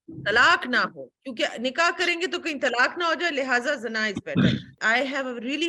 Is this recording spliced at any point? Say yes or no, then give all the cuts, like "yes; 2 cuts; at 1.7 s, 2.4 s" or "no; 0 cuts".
yes; 1 cut; at 4.7 s